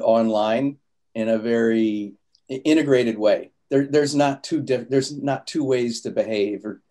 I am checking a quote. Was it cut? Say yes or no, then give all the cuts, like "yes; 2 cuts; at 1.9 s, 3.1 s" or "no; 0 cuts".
no; 0 cuts